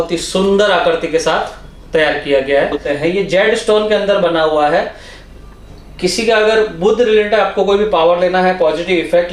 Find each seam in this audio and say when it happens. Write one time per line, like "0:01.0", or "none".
0:02.9